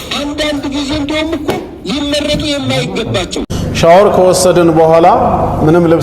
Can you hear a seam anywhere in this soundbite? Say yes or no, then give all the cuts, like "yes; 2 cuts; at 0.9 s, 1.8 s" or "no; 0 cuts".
yes; 1 cut; at 3.5 s